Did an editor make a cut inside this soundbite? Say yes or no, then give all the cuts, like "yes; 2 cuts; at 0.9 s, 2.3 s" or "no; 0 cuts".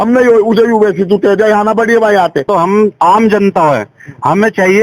yes; 1 cut; at 2.5 s